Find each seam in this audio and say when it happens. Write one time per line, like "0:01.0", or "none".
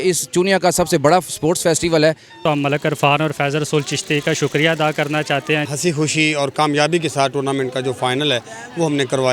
0:02.3
0:05.7